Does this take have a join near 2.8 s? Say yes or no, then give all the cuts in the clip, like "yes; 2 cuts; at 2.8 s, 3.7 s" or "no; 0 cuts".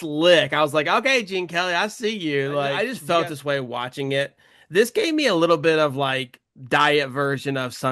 yes; 1 cut; at 2.8 s